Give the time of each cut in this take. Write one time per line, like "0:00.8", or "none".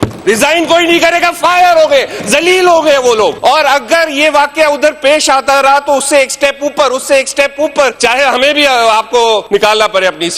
0:03.4
0:07.9
0:09.4